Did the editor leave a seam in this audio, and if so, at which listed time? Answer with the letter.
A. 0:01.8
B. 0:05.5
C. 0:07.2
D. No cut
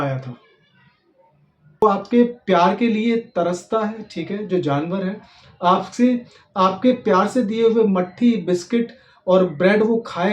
A